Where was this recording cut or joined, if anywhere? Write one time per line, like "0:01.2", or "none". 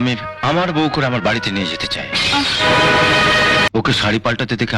0:03.7

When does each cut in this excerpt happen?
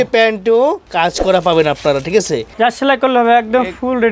0:00.8
0:02.4

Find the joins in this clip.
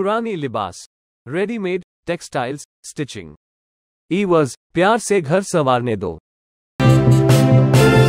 0:06.7

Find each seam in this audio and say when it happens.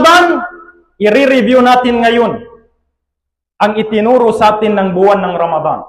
none

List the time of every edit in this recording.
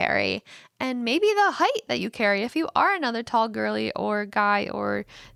none

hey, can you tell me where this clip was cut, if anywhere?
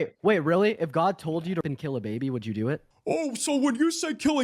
0:02.8

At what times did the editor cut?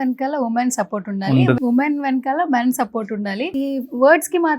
0:01.6
0:03.5

